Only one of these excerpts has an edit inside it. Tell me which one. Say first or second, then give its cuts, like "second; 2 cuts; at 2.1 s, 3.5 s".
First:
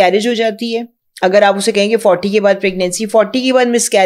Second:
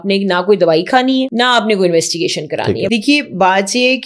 second; 2 cuts; at 1.3 s, 2.8 s